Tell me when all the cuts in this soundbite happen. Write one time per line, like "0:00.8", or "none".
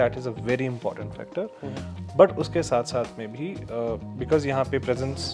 none